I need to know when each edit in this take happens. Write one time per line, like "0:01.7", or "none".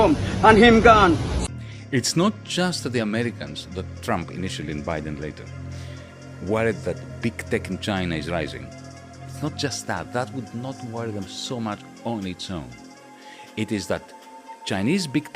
0:01.4